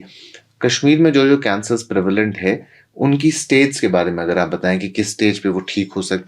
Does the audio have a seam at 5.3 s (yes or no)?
no